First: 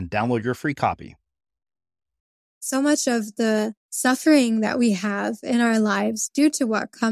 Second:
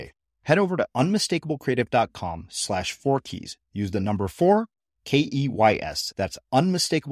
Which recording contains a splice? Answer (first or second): first